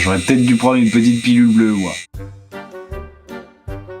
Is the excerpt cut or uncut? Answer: uncut